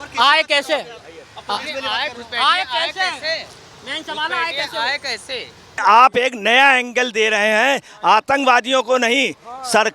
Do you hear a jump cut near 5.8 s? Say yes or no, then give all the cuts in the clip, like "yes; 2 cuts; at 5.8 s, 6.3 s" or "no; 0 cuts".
yes; 1 cut; at 5.8 s